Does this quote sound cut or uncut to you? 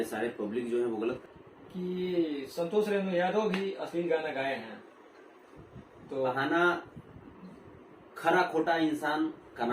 cut